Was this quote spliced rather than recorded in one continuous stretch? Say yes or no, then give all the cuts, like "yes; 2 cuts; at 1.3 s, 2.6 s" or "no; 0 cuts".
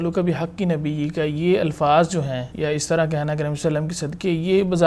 yes; 1 cut; at 2.5 s